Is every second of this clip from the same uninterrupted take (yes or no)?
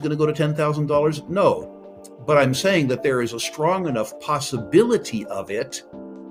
yes